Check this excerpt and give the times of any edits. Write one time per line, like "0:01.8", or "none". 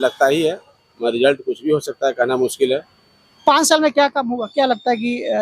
none